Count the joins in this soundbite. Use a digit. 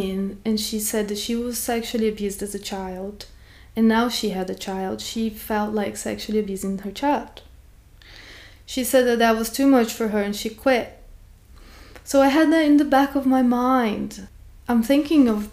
1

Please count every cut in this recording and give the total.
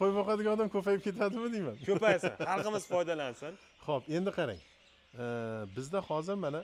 0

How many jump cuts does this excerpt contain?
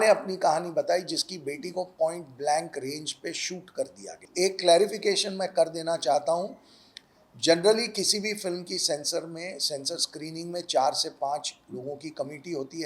1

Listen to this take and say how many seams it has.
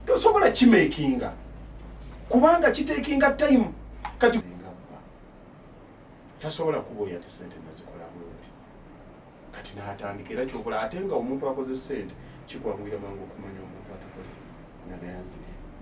1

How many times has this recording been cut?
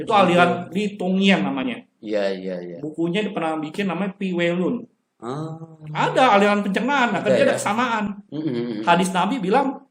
0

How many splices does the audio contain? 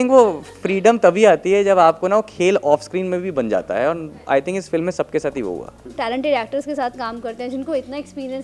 1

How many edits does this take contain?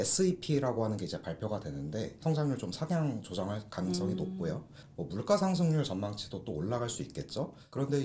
2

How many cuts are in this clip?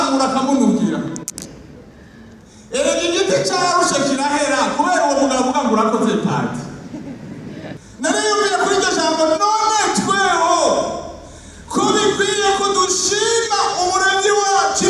1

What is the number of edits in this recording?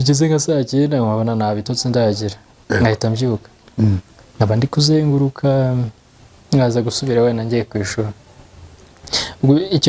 0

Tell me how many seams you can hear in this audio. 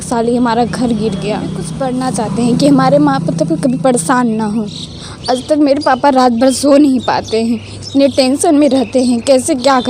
1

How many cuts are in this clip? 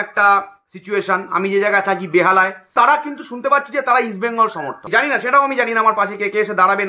2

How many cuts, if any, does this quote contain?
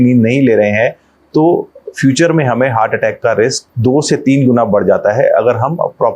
1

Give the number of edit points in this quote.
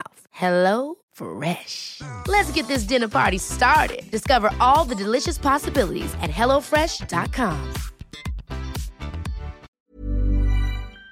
1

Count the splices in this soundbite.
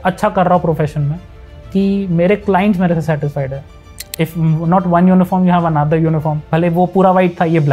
2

